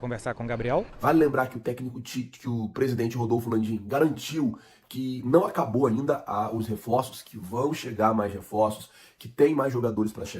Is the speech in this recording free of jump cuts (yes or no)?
no